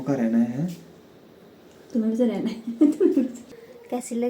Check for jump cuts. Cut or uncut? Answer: cut